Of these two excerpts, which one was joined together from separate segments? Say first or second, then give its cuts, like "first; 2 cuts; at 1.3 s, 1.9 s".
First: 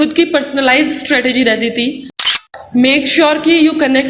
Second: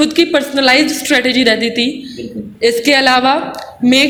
first; 1 cut; at 2.5 s